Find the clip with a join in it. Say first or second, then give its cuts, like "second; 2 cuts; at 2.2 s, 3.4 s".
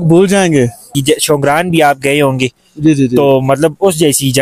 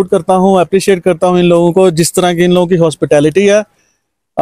first; 1 cut; at 1.0 s